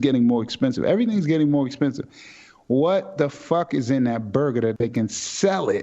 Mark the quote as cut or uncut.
cut